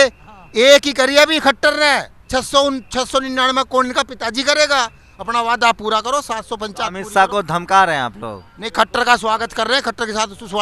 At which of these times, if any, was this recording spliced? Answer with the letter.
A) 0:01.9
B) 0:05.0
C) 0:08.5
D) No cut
D